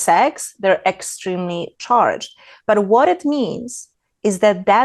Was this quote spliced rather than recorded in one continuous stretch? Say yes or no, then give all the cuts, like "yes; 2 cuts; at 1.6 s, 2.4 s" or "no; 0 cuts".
no; 0 cuts